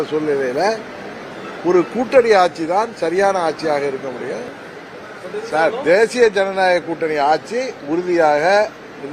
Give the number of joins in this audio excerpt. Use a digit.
1